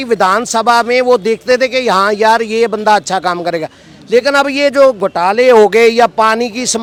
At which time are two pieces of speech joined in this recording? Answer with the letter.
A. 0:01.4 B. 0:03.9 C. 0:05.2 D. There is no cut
D